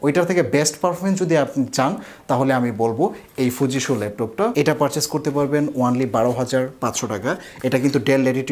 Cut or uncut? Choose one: cut